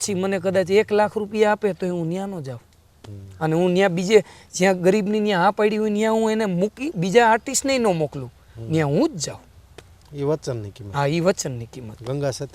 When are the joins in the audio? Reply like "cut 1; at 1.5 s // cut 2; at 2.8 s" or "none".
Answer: none

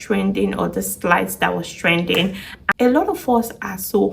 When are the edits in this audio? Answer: cut 1; at 2.6 s

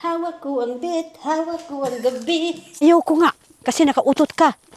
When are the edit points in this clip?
cut 1; at 2.8 s

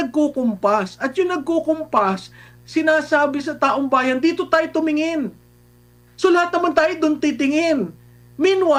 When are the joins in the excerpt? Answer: none

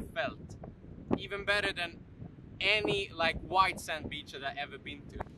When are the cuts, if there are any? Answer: none

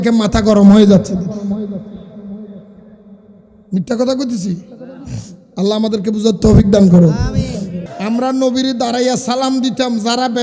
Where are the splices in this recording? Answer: cut 1; at 7.8 s

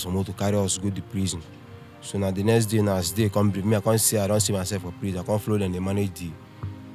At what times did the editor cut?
none

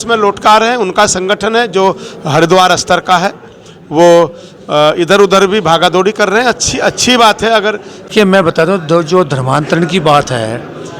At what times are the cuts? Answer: cut 1; at 8.2 s

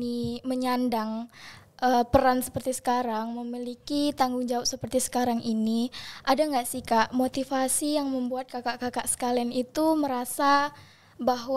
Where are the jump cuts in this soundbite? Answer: none

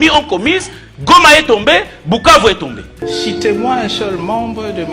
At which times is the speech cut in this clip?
cut 1; at 2.9 s

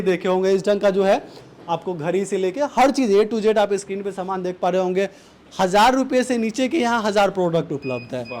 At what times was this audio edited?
none

